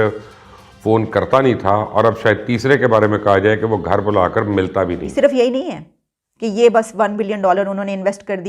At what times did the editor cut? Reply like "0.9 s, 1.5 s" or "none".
5.0 s